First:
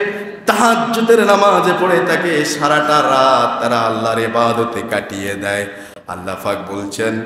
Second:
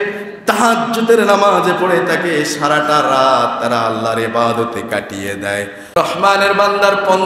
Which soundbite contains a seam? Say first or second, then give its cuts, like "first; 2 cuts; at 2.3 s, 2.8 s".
second; 1 cut; at 5.8 s